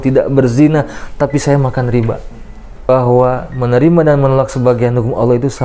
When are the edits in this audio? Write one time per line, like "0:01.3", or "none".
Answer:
0:02.9